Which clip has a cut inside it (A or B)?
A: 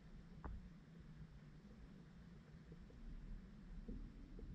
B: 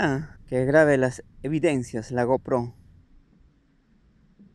B